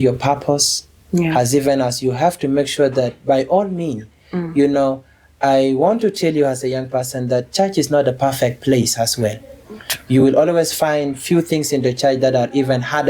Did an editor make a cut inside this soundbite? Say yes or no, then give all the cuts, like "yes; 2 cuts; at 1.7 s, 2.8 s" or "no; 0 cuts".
no; 0 cuts